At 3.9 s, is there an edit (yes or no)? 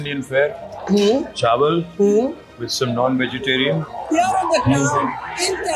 yes